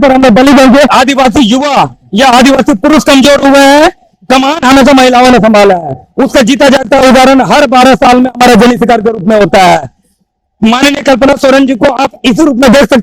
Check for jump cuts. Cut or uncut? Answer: cut